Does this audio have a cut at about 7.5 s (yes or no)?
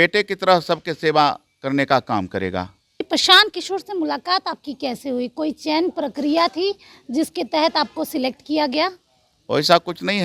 no